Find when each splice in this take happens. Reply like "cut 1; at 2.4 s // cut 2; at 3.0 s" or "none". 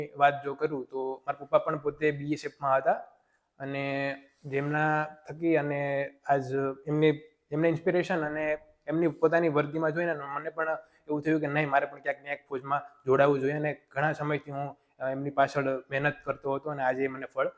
none